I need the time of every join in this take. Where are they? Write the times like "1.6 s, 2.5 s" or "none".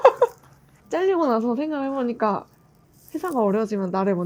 2.9 s